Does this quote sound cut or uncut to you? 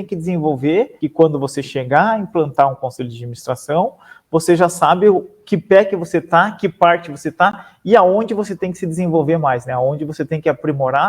cut